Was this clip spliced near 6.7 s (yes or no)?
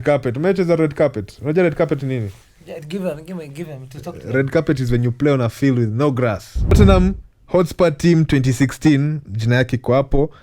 yes